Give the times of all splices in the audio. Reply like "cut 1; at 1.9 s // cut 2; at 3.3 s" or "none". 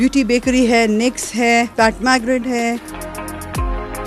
none